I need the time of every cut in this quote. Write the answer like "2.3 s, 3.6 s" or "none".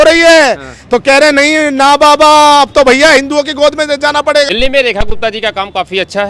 4.5 s